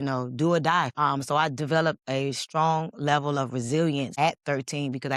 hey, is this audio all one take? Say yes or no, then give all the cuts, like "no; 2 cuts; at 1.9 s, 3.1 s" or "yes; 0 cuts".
no; 2 cuts; at 0.9 s, 4.1 s